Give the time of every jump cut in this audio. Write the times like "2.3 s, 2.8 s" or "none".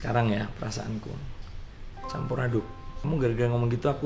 1.2 s, 2.9 s